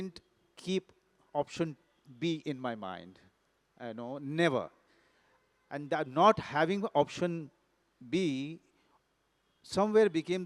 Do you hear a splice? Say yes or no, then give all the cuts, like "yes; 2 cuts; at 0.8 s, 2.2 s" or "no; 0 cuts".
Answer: no; 0 cuts